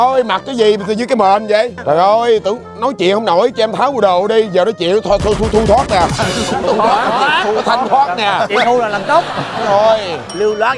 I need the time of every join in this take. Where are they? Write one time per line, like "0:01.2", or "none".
none